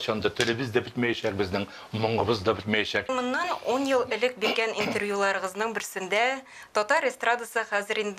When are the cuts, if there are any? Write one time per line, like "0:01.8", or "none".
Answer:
0:03.1